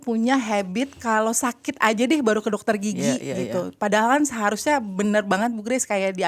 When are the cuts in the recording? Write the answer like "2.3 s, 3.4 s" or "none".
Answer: none